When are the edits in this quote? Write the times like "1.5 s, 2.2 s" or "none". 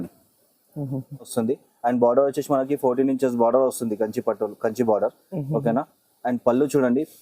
1.3 s